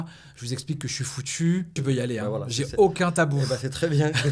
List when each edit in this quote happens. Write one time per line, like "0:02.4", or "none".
0:01.8